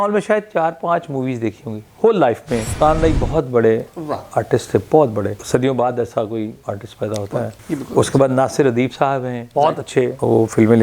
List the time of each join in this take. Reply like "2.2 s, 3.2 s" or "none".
2.7 s, 5.4 s

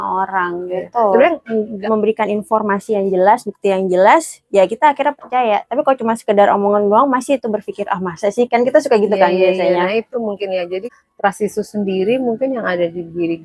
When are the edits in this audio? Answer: 1.9 s, 10.9 s

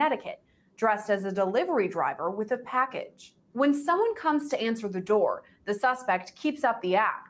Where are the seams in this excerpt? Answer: none

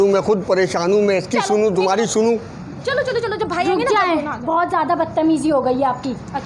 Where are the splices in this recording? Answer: none

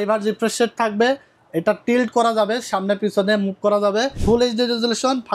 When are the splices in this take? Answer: 4.1 s

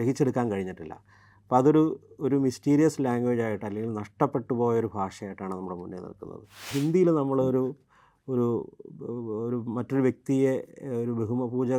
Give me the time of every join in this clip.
6.7 s

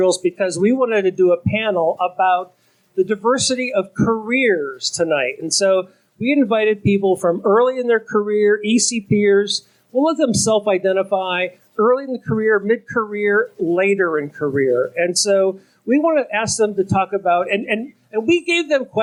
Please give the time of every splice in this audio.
none

